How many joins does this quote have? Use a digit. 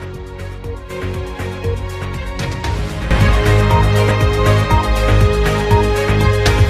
1